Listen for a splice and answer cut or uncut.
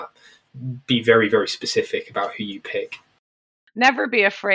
cut